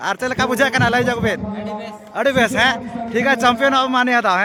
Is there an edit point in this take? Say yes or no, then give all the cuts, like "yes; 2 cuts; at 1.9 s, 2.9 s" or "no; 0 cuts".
no; 0 cuts